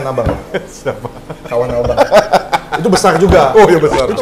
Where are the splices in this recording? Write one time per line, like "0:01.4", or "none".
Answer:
none